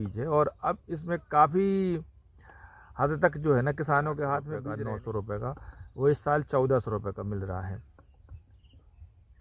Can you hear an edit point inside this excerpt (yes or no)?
yes